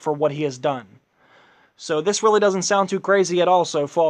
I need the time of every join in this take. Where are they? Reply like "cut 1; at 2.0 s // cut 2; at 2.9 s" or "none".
cut 1; at 2.9 s